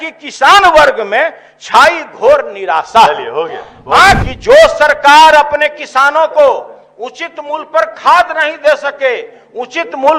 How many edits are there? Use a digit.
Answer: 1